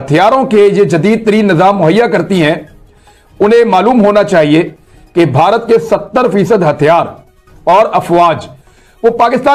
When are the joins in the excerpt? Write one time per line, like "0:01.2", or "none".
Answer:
none